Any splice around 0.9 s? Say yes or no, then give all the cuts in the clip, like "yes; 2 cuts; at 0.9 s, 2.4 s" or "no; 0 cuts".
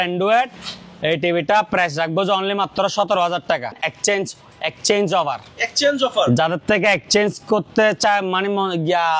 no; 1 cut; at 3.7 s